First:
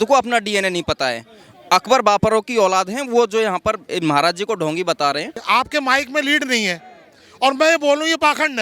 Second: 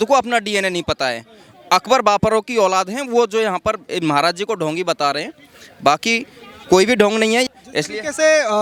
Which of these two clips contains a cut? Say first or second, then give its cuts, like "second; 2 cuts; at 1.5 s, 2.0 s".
first; 1 cut; at 5.4 s